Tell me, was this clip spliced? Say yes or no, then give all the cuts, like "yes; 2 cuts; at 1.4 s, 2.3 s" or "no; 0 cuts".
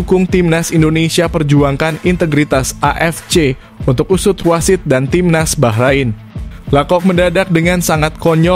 no; 0 cuts